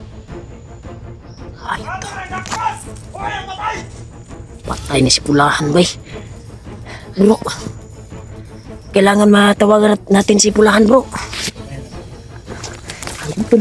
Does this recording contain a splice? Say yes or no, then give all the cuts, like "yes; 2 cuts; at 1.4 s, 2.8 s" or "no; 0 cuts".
yes; 1 cut; at 1.6 s